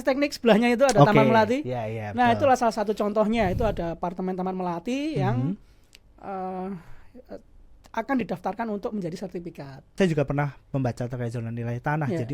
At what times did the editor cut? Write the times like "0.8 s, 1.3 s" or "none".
10.0 s